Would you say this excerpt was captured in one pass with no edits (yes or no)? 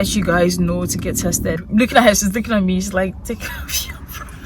no